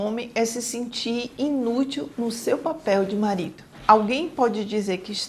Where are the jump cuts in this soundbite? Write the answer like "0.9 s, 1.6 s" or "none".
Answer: 3.7 s

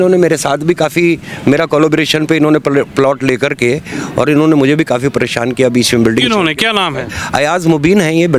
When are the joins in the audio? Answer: none

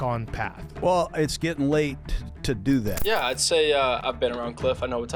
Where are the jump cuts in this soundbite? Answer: 3.0 s

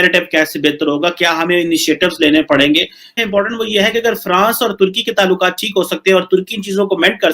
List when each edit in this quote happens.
3.2 s

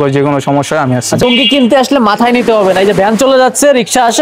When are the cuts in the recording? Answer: 1.2 s

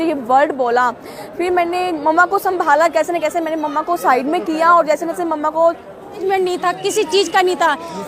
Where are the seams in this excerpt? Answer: 6.2 s

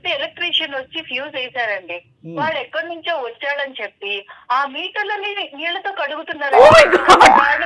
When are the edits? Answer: none

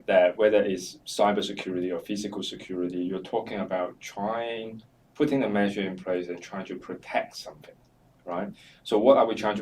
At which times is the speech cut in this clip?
none

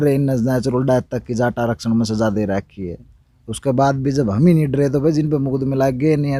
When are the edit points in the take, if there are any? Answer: none

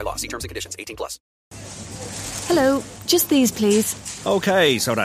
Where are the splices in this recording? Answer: 1.3 s

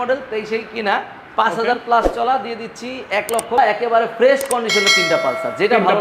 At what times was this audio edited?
3.6 s

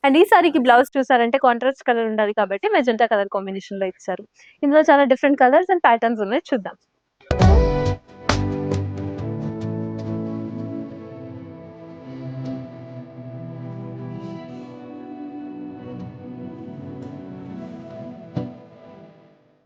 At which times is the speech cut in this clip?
none

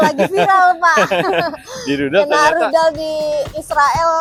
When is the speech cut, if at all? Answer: none

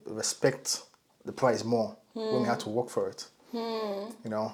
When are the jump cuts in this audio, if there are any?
none

